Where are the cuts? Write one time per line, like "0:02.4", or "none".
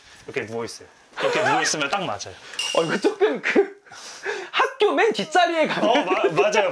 none